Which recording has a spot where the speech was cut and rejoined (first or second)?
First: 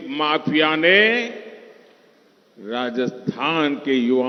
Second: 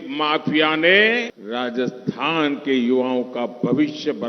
second